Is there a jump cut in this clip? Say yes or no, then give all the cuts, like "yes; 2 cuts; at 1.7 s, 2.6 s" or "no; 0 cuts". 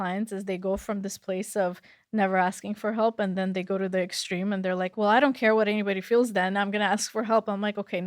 no; 0 cuts